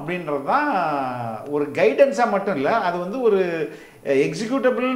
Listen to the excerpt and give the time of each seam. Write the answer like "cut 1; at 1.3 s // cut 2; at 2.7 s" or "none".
none

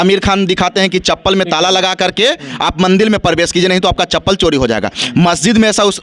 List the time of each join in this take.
none

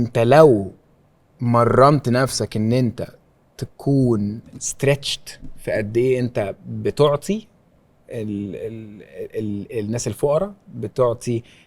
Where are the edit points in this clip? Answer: none

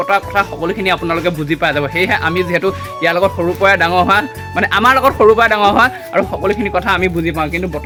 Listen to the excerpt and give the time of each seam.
none

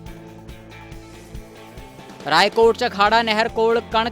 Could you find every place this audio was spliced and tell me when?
none

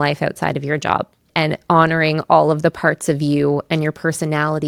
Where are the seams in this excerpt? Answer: none

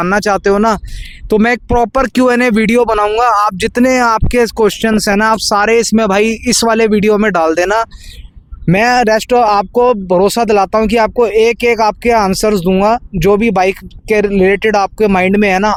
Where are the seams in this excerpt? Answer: none

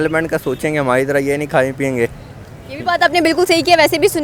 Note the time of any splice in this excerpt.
none

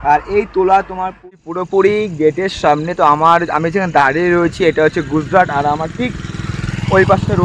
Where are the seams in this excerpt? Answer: cut 1; at 1.2 s

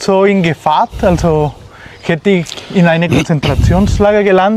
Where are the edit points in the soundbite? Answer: none

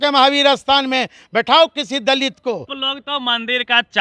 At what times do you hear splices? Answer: cut 1; at 2.8 s

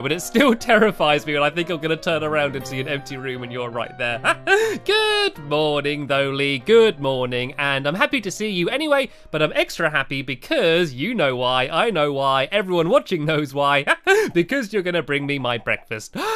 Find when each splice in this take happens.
none

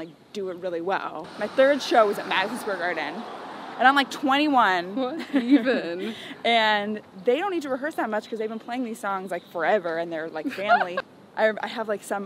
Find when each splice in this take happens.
cut 1; at 1.3 s // cut 2; at 11.0 s

